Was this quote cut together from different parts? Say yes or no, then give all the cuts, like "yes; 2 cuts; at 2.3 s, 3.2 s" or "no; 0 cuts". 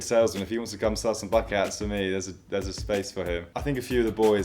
yes; 1 cut; at 3.5 s